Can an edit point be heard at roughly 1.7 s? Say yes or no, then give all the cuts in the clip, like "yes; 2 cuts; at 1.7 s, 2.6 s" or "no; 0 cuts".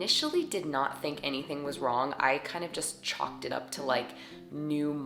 no; 0 cuts